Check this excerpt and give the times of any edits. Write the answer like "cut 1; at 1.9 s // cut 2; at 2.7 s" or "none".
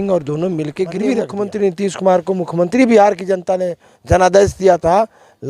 cut 1; at 1.3 s